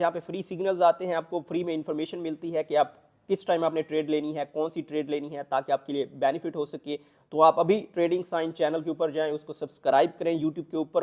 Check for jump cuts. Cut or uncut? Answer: uncut